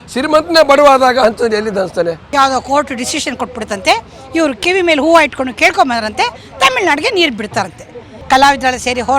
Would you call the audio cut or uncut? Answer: cut